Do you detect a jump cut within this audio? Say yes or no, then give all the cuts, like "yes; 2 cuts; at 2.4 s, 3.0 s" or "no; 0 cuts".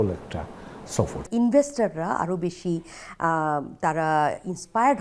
yes; 1 cut; at 1.2 s